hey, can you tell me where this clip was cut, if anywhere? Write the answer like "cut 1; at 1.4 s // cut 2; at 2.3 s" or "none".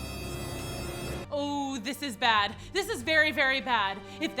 cut 1; at 1.2 s